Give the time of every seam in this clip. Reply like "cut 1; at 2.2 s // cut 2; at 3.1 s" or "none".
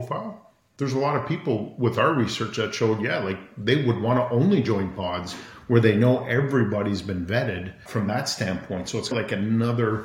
cut 1; at 7.8 s // cut 2; at 9.1 s